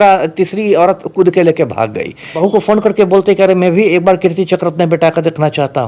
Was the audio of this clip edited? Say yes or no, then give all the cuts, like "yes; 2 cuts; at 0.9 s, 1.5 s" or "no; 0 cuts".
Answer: yes; 1 cut; at 2.3 s